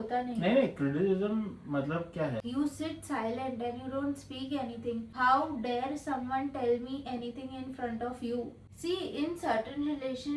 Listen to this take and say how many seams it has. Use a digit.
3